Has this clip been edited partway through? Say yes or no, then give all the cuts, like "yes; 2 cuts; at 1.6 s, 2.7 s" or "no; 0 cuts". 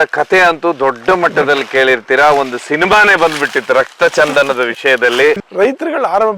yes; 1 cut; at 5.4 s